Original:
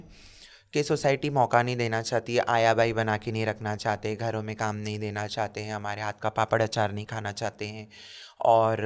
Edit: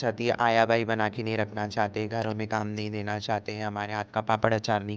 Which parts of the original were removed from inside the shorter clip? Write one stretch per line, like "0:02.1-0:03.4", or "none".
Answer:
none